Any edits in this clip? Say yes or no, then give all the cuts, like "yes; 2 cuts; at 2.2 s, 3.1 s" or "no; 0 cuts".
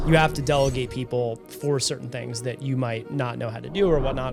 no; 0 cuts